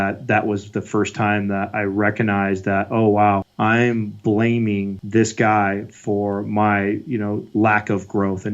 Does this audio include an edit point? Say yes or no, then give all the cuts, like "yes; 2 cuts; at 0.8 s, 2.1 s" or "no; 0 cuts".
yes; 2 cuts; at 3.5 s, 5.0 s